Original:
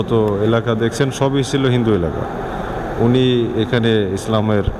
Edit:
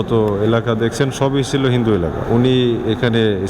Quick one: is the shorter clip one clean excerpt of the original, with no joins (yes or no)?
no